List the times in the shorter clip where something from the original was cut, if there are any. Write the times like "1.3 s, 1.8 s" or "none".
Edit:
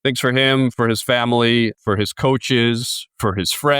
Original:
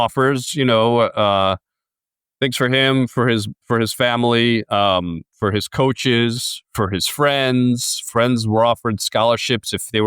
0.7 s, 1.7 s